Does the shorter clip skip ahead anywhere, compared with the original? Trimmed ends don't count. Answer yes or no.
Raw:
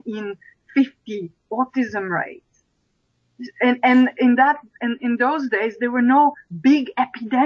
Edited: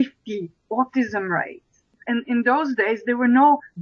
yes